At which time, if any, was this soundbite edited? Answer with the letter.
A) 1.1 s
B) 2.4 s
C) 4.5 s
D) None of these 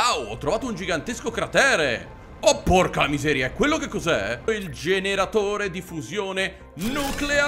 C